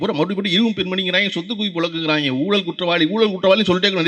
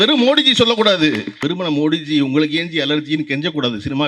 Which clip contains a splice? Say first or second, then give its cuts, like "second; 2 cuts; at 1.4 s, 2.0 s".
second; 1 cut; at 1.4 s